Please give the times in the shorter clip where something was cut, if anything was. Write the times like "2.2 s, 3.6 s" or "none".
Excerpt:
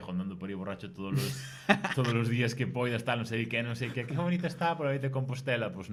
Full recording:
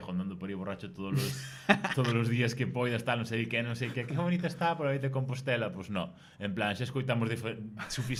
none